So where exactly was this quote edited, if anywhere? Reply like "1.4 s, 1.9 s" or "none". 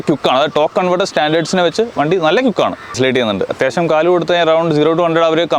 2.9 s